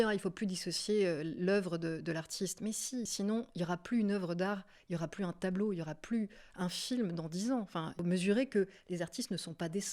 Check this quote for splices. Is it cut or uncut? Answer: cut